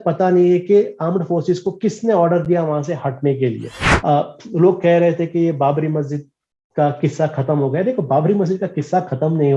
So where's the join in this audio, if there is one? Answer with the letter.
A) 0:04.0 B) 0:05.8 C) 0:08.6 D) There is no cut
A